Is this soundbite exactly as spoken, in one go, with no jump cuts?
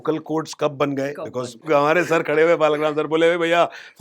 no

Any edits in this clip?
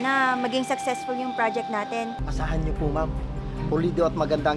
yes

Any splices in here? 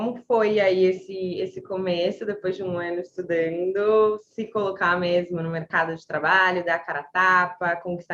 no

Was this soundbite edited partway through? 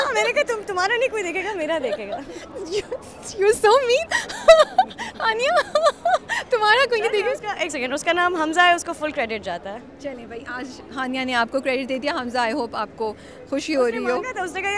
no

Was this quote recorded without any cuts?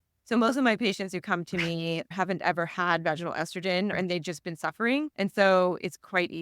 no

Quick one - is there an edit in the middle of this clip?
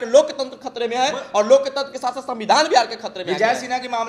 no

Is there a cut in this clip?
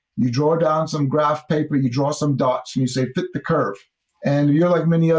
no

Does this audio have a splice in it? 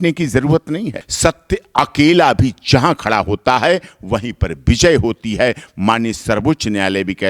yes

